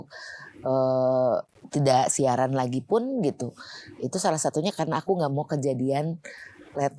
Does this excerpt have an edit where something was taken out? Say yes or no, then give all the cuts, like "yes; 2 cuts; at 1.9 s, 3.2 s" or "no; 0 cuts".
no; 0 cuts